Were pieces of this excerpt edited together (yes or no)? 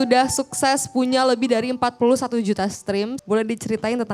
yes